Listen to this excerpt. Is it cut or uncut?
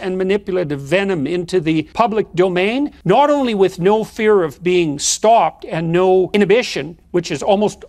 cut